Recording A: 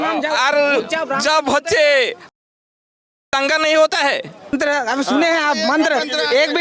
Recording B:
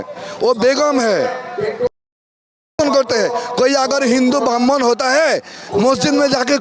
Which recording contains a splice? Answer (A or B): A